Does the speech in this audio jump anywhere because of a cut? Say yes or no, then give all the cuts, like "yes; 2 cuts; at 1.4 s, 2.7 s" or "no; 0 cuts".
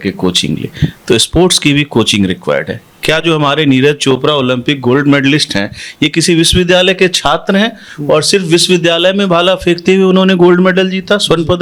no; 0 cuts